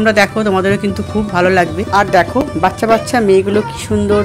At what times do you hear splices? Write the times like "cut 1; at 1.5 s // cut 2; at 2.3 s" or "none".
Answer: none